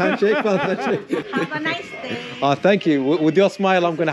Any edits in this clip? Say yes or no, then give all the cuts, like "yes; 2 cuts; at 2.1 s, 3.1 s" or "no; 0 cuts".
yes; 1 cut; at 1.3 s